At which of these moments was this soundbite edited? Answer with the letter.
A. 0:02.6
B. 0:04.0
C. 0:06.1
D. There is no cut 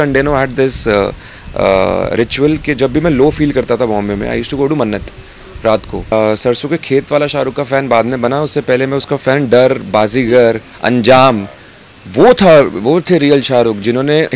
C